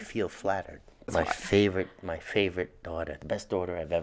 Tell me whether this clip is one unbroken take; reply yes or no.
no